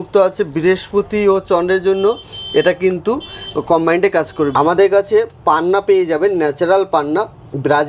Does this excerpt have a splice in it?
yes; 1 cut; at 4.5 s

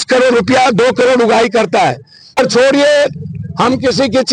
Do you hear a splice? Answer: yes; 1 cut; at 2.4 s

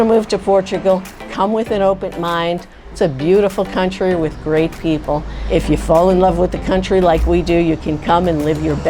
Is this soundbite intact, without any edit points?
no; 2 cuts; at 2.8 s, 5.3 s

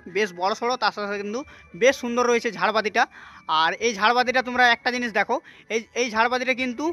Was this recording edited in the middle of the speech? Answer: no; 0 cuts

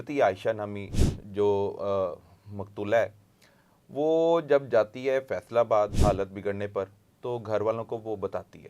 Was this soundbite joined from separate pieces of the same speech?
yes; 1 cut; at 6.0 s

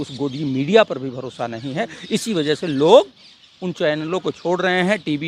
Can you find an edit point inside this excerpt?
no; 0 cuts

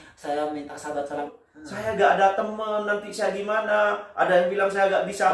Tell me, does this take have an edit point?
yes; 1 cut; at 1.4 s

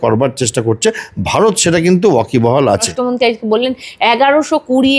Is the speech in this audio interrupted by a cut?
yes; 1 cut; at 2.9 s

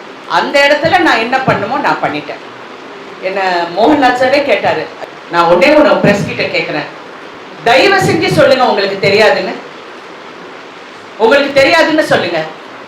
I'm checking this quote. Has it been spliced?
yes; 1 cut; at 5.0 s

